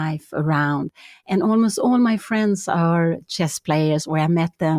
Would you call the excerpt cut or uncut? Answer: uncut